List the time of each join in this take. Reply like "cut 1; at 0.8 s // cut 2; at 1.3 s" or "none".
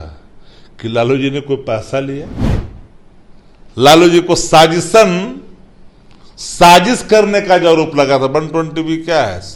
cut 1; at 2.4 s